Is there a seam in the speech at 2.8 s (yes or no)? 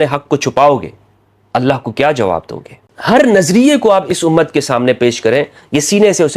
yes